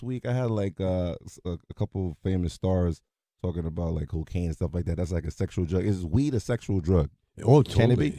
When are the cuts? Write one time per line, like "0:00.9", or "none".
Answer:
0:02.3